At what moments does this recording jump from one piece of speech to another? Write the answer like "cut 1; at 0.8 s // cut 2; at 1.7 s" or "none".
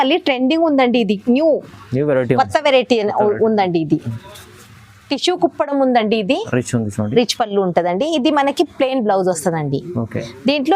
cut 1; at 6.4 s